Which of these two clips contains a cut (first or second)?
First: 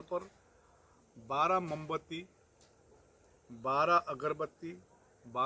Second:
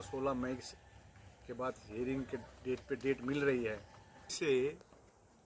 second